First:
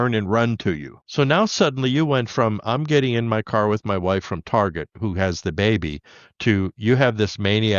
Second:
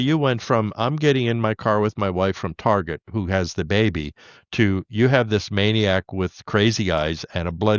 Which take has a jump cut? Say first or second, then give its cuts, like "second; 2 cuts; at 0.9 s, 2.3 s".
first; 1 cut; at 1.0 s